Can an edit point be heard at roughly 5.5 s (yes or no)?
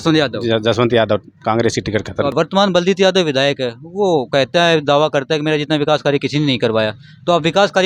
no